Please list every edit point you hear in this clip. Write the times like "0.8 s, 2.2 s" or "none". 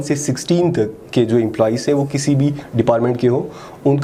none